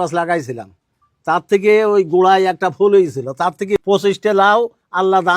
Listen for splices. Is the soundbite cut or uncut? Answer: cut